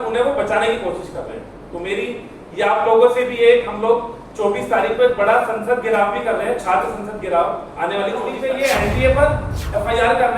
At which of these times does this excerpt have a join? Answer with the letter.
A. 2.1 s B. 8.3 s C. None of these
B